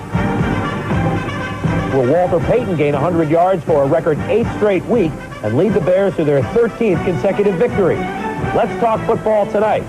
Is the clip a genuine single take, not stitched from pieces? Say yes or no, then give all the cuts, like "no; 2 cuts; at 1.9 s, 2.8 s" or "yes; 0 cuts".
no; 1 cut; at 4.2 s